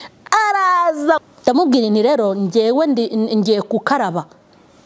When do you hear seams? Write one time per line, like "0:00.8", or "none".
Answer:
0:01.2